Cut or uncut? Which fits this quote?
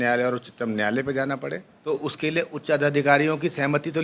cut